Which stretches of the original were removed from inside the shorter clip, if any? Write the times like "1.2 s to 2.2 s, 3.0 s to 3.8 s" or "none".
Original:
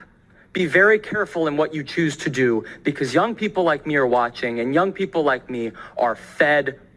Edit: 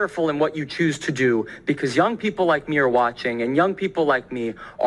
none